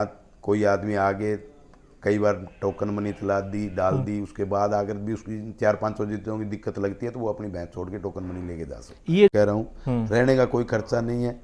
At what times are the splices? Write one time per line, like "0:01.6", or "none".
0:09.3